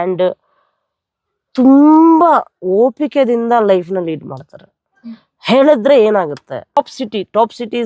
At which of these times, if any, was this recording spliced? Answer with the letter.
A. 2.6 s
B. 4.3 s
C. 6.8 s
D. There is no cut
C